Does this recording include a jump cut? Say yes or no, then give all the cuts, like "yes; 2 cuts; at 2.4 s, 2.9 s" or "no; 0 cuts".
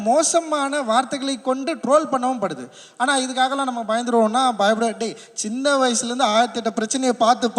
no; 0 cuts